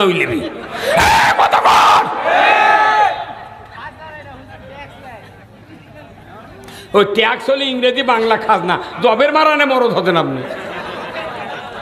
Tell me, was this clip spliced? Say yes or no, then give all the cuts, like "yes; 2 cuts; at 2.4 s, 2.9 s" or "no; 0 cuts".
no; 0 cuts